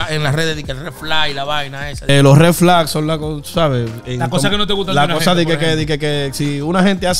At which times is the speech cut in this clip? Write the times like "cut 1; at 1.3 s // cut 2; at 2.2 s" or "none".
cut 1; at 2.1 s